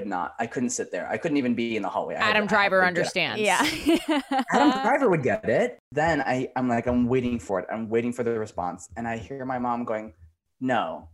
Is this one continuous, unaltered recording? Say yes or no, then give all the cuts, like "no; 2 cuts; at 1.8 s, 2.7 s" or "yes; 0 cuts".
yes; 0 cuts